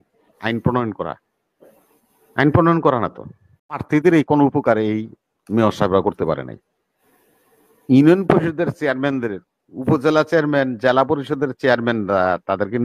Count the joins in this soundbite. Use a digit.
1